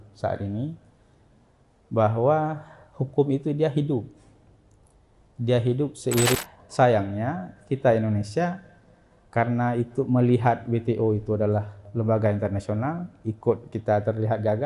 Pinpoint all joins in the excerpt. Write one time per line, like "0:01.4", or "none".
0:06.3